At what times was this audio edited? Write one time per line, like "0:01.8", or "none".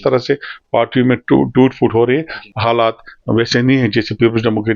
0:02.4